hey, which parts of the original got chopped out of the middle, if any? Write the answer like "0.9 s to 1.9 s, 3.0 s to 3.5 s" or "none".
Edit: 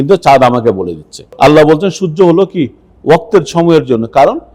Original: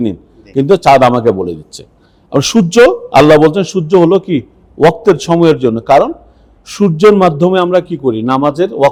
1.9 s to 3.0 s